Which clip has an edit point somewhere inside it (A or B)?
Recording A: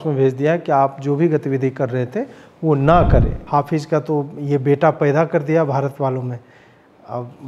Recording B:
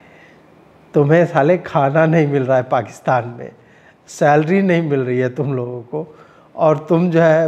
A